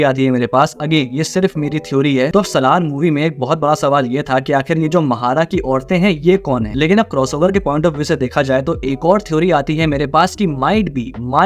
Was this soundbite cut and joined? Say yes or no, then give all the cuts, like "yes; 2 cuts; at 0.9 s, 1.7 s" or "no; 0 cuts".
yes; 2 cuts; at 2.3 s, 6.7 s